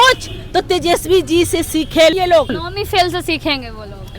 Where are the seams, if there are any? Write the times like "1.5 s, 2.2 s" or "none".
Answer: 2.1 s